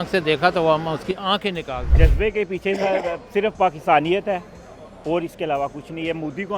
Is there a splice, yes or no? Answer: yes